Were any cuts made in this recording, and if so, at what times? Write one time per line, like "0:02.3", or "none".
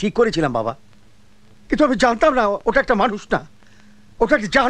none